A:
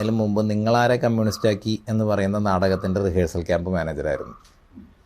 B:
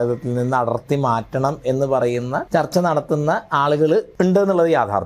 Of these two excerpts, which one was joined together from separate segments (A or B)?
B